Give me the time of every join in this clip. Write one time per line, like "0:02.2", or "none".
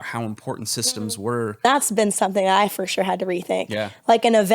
0:01.6